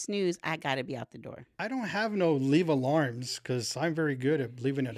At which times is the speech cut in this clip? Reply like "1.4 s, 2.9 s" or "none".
1.6 s